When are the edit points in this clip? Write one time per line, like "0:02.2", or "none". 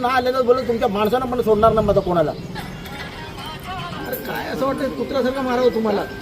0:04.0